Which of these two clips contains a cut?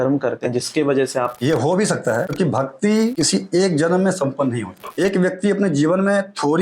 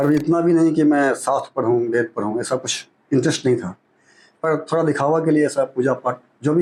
first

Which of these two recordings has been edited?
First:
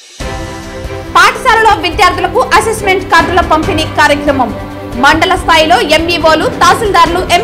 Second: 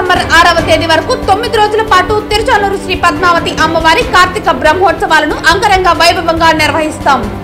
first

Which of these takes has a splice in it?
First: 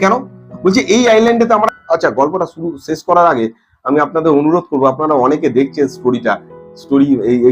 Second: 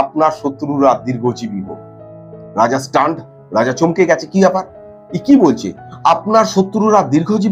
first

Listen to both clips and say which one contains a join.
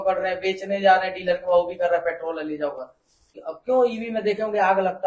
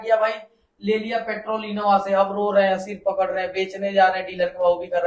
first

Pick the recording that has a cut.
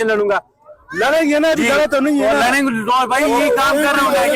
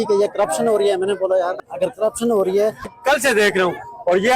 second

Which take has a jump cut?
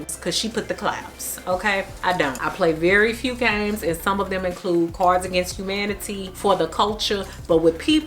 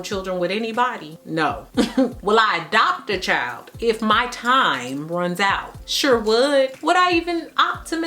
second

